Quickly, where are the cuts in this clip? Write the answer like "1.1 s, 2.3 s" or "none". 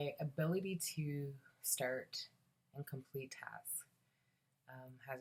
none

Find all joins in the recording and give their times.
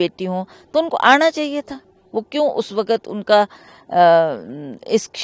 none

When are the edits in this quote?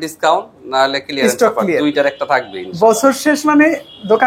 none

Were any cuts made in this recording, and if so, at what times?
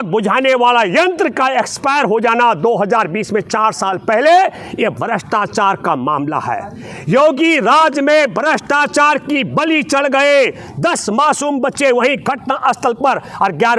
none

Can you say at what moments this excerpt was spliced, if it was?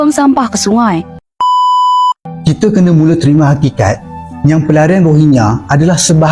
1.3 s

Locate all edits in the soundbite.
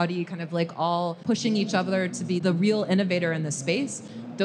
none

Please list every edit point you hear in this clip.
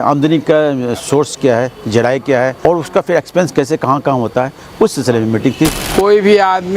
2.6 s, 5.8 s

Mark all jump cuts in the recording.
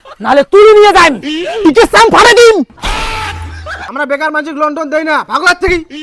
3.8 s

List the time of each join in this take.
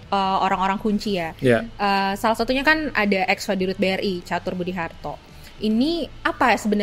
none

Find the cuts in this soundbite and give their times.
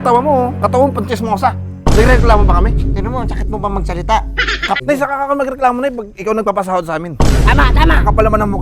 4.8 s

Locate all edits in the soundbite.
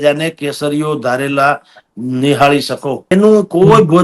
3.1 s

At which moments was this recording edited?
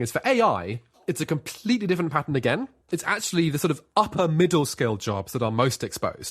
2.9 s

